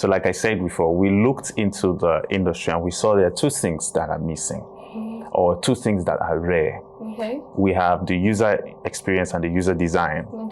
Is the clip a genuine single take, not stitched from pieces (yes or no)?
yes